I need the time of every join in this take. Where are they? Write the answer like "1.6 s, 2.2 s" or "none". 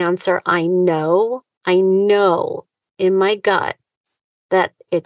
1.5 s

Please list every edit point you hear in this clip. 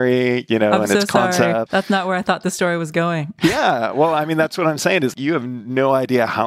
1.7 s, 3.3 s, 5.1 s

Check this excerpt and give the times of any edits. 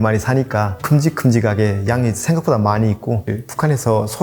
3.3 s

